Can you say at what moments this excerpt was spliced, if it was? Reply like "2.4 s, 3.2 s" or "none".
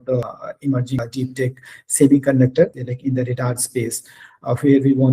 2.7 s